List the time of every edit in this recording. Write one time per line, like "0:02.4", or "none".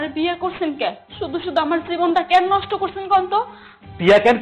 none